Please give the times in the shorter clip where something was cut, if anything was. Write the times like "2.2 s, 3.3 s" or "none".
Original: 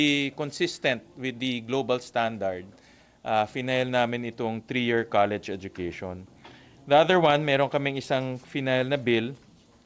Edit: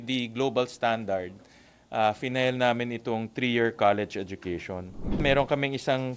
5.2 s